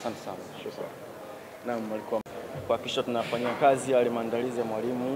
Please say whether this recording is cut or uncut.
cut